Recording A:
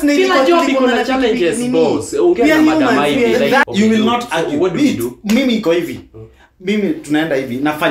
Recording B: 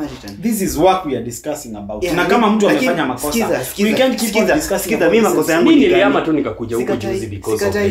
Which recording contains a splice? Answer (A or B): A